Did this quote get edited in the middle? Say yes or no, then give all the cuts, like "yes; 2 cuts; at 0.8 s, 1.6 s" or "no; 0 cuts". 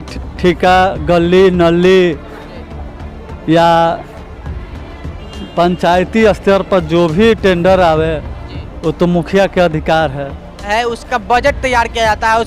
yes; 1 cut; at 10.7 s